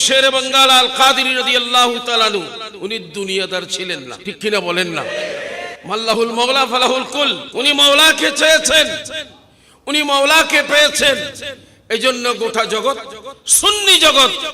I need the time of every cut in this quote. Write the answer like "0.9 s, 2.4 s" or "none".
4.1 s, 5.7 s, 7.4 s